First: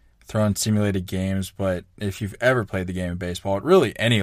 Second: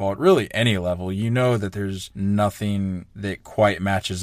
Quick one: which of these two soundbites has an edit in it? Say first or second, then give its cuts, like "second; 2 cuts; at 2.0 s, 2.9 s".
second; 2 cuts; at 2.0 s, 3.1 s